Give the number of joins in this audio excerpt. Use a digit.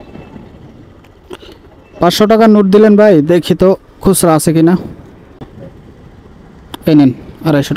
1